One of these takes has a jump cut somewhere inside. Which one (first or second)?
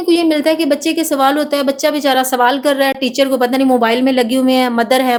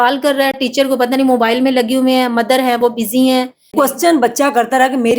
second